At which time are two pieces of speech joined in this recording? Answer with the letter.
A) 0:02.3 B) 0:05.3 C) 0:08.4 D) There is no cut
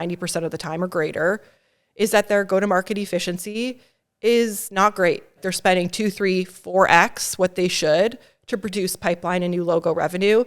B